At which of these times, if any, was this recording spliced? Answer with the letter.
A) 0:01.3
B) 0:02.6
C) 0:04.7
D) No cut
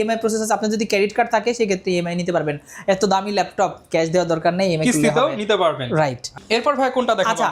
D